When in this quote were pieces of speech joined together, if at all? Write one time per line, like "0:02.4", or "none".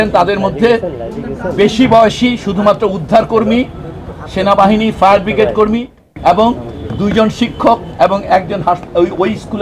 none